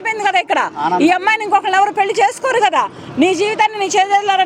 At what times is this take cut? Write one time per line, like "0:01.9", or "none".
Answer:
none